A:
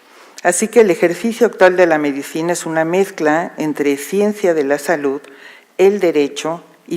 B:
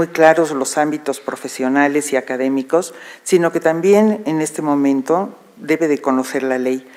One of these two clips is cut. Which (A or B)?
A